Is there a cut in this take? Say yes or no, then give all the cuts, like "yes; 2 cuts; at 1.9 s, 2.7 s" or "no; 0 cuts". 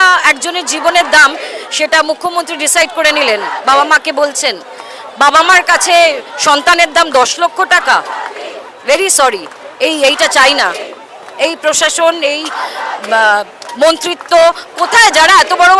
no; 0 cuts